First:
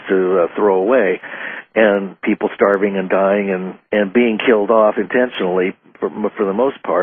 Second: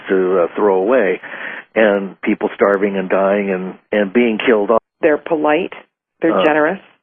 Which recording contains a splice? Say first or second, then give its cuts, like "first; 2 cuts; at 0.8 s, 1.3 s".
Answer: first; 1 cut; at 4.8 s